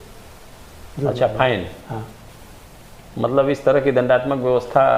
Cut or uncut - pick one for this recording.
uncut